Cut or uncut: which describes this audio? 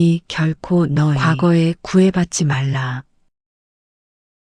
cut